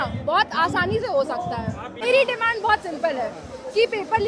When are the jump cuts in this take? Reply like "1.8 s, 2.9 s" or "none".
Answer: 2.0 s